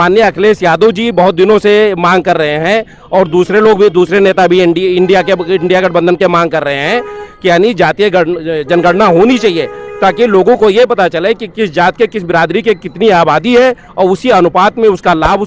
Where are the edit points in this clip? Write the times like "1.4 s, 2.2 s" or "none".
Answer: none